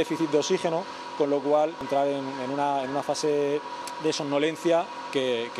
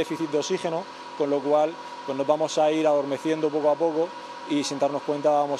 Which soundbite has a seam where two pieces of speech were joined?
first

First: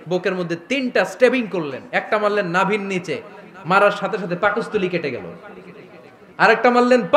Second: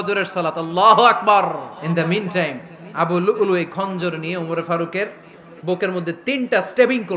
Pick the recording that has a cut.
second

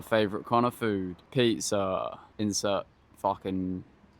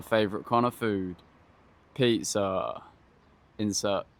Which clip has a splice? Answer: first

